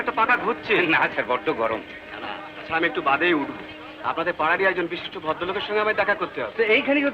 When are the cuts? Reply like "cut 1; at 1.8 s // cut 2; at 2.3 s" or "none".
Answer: none